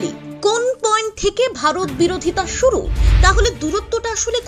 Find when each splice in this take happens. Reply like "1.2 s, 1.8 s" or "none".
3.0 s